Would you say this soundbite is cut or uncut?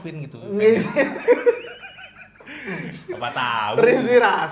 uncut